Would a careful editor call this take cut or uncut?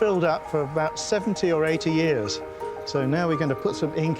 uncut